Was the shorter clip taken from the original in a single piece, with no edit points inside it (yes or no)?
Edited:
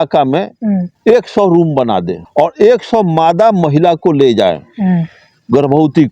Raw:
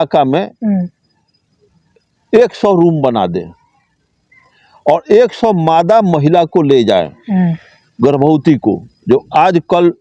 no